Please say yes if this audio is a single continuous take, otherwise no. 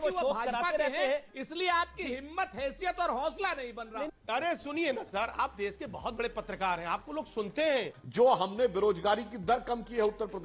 no